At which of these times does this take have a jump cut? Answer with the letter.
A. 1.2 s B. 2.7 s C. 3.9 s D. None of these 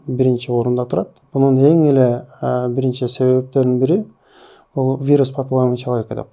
A